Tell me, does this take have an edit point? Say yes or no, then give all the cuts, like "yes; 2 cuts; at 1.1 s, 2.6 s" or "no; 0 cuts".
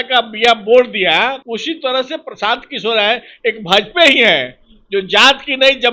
yes; 1 cut; at 1.4 s